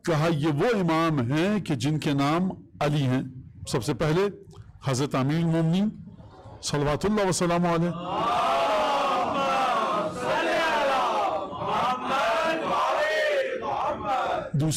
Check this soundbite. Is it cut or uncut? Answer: uncut